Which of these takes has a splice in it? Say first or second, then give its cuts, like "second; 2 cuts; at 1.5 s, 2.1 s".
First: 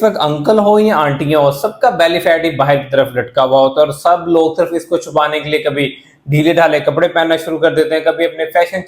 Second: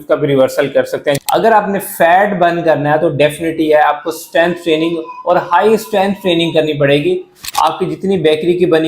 second; 2 cuts; at 1.2 s, 7.4 s